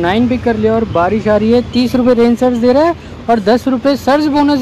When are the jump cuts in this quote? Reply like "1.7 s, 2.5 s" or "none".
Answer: none